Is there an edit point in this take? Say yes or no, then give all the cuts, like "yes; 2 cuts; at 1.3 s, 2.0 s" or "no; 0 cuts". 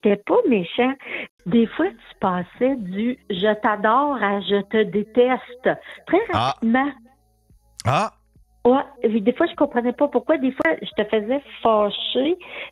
yes; 1 cut; at 1.2 s